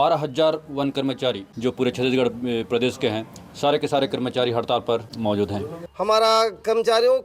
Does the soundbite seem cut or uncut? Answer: cut